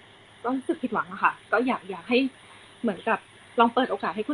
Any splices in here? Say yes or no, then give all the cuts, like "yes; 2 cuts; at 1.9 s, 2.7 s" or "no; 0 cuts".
no; 0 cuts